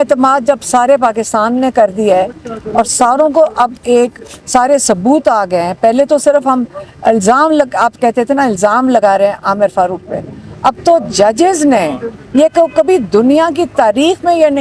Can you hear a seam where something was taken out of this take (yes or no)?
no